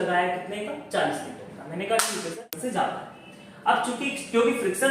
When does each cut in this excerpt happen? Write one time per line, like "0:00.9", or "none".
0:02.5